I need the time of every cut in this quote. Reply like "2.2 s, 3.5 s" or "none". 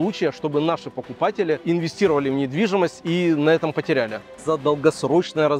1.6 s, 4.4 s